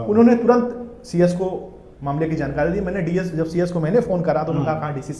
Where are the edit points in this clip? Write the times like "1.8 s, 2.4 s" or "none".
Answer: none